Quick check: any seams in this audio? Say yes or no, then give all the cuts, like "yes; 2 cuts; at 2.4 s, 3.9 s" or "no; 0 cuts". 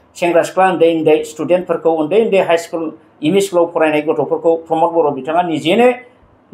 no; 0 cuts